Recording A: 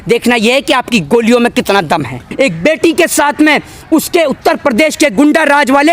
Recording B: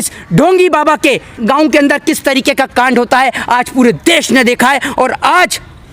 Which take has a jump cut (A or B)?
A